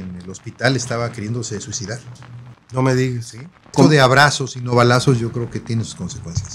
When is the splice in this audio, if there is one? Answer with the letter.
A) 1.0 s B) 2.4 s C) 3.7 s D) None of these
C